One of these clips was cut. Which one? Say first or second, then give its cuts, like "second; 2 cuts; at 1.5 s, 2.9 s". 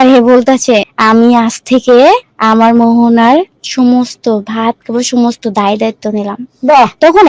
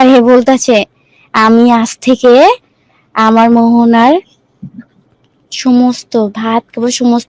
first; 3 cuts; at 0.9 s, 2.3 s, 3.6 s